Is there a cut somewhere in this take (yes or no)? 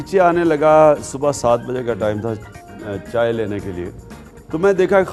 no